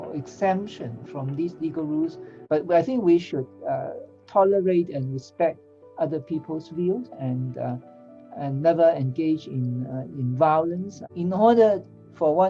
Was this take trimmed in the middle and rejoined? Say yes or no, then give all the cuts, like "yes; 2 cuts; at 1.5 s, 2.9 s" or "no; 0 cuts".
yes; 2 cuts; at 2.4 s, 11.0 s